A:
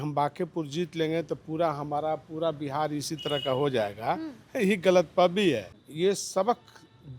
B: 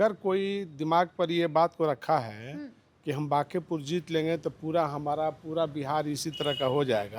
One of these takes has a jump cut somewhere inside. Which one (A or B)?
A